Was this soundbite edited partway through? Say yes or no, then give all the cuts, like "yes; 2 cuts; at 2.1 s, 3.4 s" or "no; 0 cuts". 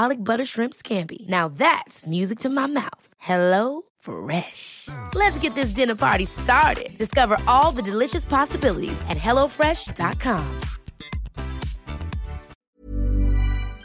yes; 1 cut; at 12.5 s